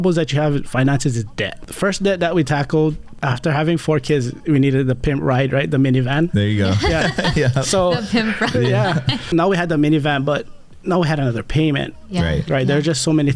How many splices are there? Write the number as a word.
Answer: three